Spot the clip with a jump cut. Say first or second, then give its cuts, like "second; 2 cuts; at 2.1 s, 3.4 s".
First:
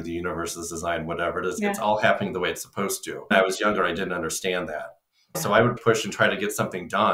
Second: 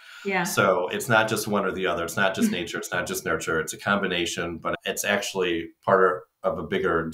first; 2 cuts; at 3.3 s, 5.8 s